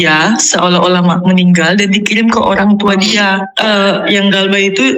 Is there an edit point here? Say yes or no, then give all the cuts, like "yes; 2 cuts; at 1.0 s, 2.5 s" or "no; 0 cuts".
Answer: yes; 1 cut; at 3.5 s